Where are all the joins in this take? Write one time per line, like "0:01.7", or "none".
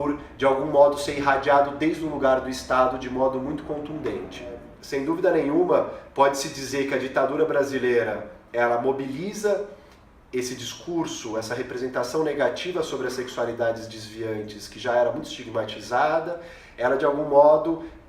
0:04.7